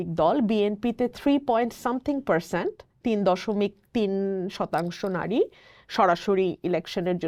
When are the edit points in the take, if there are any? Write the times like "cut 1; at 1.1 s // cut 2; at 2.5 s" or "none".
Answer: none